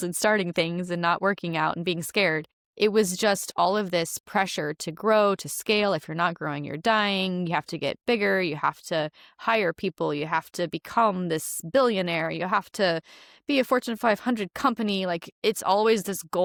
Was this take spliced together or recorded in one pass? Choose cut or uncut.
uncut